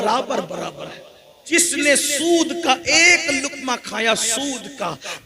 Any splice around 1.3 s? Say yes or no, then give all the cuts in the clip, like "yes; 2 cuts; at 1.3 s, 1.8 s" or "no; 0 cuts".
yes; 1 cut; at 1.3 s